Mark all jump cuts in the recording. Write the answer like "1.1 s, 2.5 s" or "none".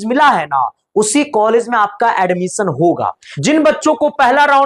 3.3 s